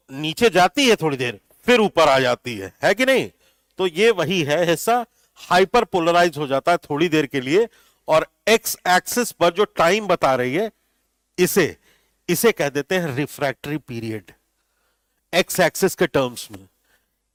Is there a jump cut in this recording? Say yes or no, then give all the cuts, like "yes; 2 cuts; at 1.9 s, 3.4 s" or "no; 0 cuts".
no; 0 cuts